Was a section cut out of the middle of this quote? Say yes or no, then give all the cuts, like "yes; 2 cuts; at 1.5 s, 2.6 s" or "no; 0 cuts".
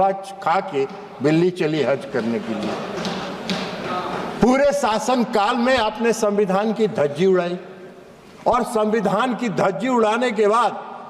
no; 0 cuts